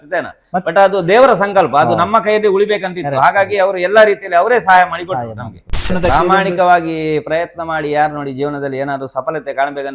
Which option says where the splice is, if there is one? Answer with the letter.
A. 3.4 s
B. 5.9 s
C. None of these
B